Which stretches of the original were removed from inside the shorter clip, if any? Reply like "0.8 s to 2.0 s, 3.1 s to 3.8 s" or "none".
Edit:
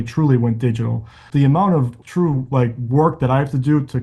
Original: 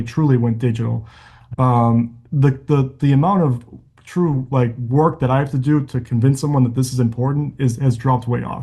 1.2 s to 2.9 s, 3.7 s to 4.0 s

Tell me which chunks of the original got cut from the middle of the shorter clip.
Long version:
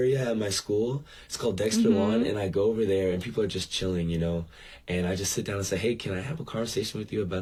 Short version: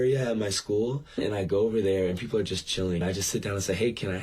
1.2 s to 2.2 s, 4.1 s to 5.1 s

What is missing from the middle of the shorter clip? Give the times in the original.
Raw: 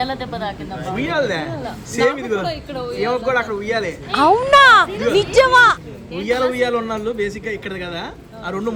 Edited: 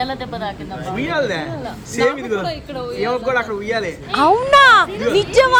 none

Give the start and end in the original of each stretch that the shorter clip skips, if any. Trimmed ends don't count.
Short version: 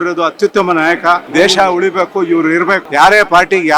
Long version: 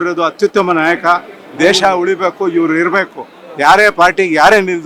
1.2 s to 1.5 s, 3.1 s to 3.5 s

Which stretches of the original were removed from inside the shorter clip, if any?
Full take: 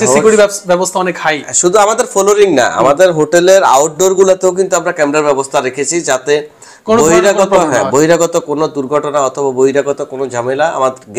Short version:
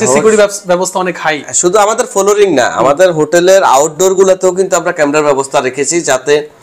none

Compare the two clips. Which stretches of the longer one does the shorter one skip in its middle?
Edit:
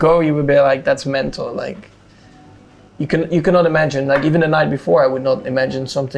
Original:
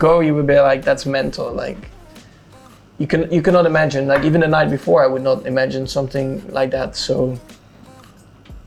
none

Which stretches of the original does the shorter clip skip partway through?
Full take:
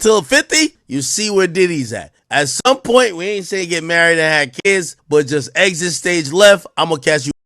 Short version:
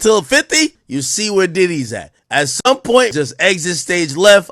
3.1 s to 5.3 s

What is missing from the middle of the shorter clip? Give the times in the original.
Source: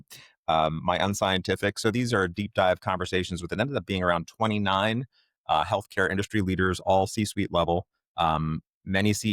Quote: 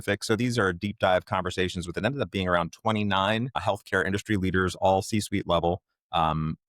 5.2 s to 5.7 s

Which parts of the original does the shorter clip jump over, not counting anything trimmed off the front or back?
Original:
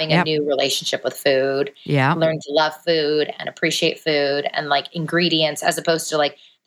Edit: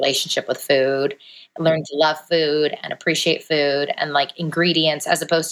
none

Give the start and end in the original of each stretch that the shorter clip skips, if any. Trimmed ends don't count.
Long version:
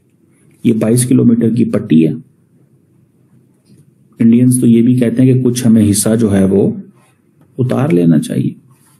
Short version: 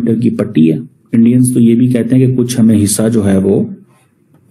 2.3 s to 4.0 s

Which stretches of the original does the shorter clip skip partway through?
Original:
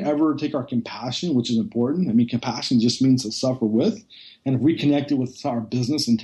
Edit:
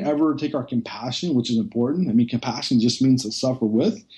none

